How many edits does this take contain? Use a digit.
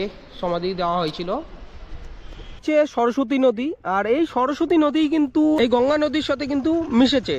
1